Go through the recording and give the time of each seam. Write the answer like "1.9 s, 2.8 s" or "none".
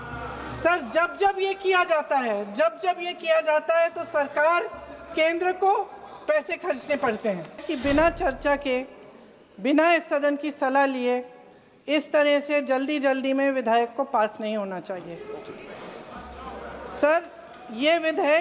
7.6 s